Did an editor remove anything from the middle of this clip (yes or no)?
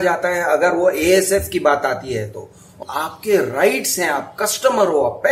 yes